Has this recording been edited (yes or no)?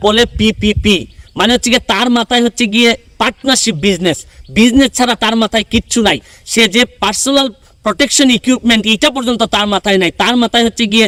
no